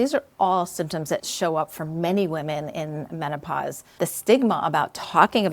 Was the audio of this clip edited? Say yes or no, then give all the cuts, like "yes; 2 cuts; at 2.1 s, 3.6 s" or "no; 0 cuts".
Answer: yes; 2 cuts; at 1.3 s, 4.0 s